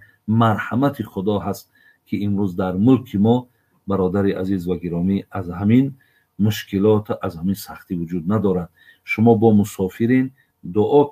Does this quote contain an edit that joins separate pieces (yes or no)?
no